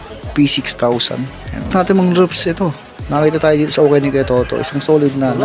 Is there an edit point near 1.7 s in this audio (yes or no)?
yes